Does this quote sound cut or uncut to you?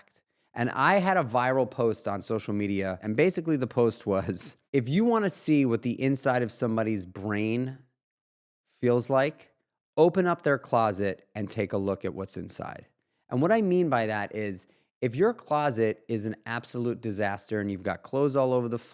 cut